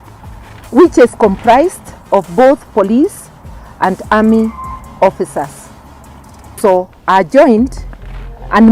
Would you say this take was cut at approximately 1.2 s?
no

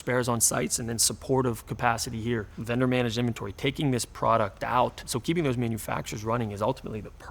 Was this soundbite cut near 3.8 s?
no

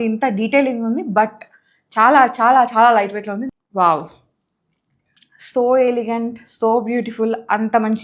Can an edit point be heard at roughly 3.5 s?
yes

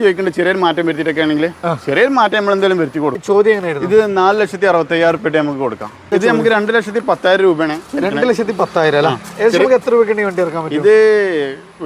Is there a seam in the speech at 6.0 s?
yes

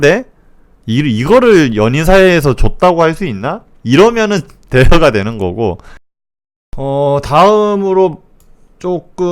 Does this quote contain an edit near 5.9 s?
yes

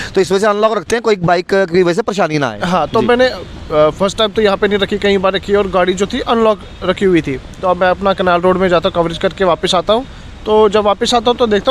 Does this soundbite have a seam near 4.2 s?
no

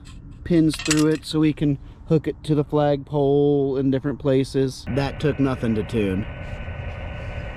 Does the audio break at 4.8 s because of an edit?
yes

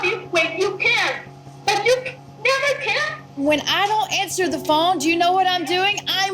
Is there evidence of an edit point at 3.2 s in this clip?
no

